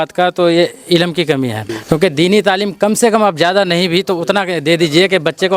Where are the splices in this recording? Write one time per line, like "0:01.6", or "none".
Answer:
0:01.7

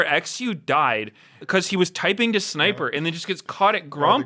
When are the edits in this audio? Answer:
0:01.4

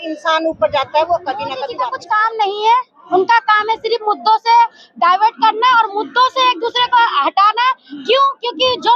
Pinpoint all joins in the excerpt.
0:01.7

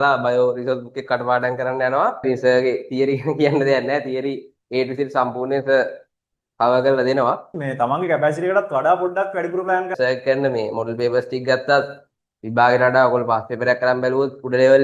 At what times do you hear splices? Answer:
0:02.2
0:07.5
0:09.9

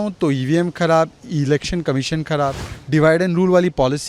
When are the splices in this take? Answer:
0:02.7

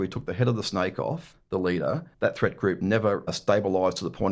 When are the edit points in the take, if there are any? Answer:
0:01.3
0:02.1
0:03.3

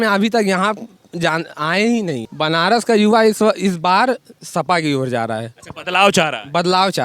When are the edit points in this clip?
0:02.3

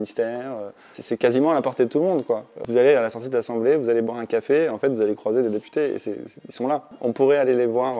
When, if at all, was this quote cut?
0:00.9
0:02.6
0:06.9

